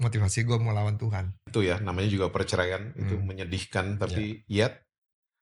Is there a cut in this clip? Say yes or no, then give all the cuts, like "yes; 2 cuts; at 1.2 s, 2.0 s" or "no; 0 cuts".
yes; 1 cut; at 1.4 s